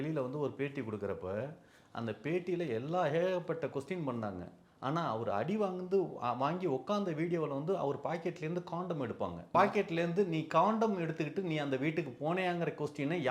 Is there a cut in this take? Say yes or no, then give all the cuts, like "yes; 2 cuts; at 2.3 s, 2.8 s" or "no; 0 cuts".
yes; 1 cut; at 9.6 s